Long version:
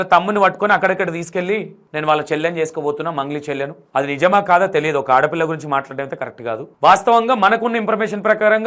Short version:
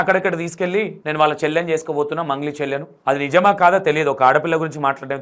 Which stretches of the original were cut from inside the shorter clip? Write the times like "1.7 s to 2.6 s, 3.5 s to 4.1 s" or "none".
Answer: 1.7 s to 1.9 s